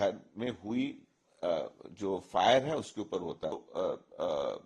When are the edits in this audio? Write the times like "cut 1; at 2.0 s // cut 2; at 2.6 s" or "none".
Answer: cut 1; at 3.6 s